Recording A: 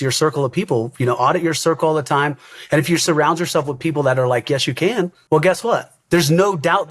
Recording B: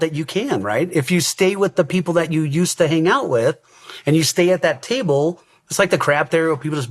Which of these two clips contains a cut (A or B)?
A